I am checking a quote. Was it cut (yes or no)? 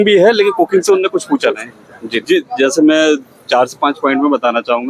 yes